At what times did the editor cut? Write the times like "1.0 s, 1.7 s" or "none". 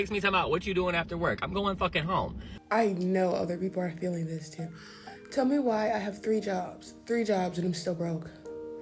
2.5 s